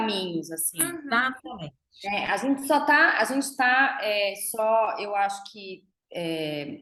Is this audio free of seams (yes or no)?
yes